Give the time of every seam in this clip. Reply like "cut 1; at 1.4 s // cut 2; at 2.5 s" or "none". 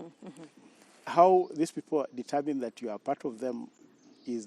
none